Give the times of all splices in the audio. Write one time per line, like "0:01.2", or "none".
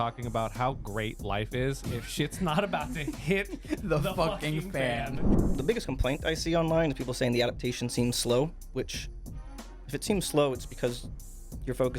0:05.4